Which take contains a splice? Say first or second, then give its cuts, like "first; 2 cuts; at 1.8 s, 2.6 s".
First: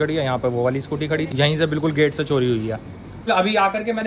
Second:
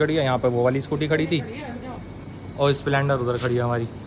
first; 2 cuts; at 1.3 s, 3.3 s